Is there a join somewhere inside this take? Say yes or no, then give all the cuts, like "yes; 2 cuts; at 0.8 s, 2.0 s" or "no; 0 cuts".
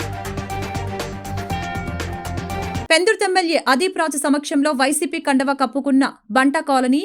yes; 1 cut; at 2.6 s